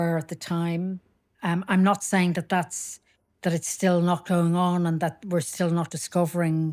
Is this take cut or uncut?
uncut